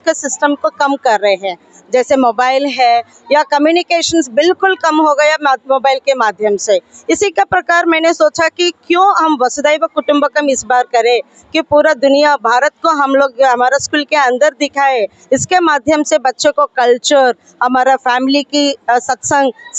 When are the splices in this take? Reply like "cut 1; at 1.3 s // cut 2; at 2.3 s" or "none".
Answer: none